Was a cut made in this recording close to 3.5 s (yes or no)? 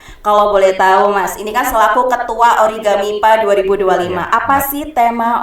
no